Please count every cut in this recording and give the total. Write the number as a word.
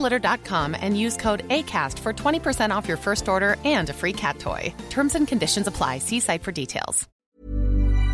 one